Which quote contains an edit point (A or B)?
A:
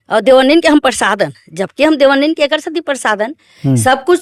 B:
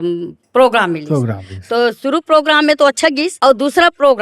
B